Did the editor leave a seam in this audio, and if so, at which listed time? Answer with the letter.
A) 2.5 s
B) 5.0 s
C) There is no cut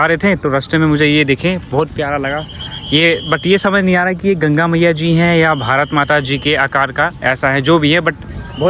C